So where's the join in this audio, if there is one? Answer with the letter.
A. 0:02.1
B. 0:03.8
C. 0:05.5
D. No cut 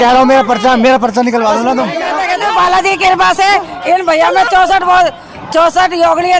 A